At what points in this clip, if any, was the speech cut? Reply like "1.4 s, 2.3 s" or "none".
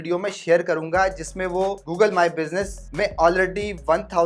none